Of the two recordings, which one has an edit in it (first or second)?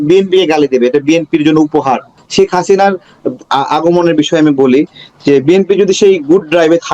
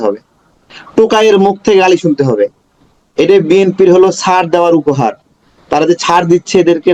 first